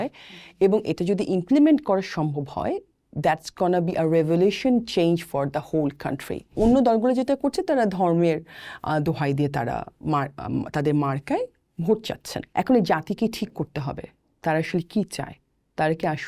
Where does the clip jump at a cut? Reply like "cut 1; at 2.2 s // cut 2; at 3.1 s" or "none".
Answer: cut 1; at 6.5 s // cut 2; at 12.3 s